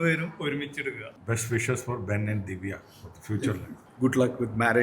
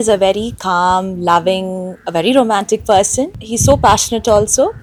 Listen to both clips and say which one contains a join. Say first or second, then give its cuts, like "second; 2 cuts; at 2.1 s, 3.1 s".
first; 1 cut; at 3.9 s